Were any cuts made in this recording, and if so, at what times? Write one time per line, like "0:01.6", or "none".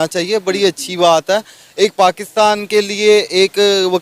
none